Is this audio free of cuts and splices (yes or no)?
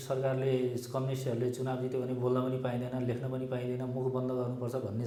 yes